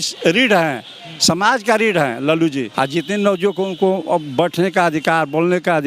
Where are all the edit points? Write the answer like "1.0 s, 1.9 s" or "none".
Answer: 2.7 s